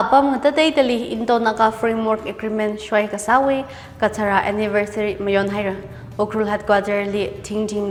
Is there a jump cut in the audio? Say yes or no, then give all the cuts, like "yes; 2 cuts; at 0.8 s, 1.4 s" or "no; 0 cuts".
no; 0 cuts